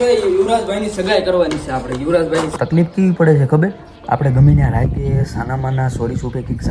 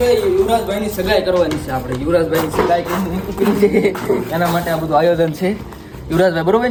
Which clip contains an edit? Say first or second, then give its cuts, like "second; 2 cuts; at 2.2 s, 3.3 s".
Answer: first; 1 cut; at 2.5 s